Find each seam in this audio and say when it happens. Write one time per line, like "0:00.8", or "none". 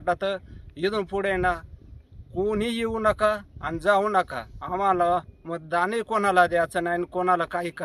none